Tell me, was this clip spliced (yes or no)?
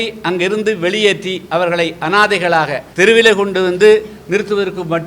yes